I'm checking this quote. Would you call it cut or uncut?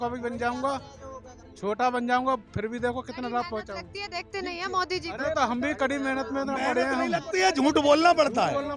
uncut